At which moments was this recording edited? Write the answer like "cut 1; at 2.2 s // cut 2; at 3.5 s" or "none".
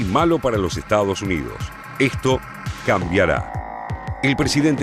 cut 1; at 1.2 s